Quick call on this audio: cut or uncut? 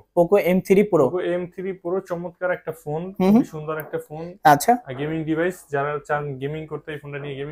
uncut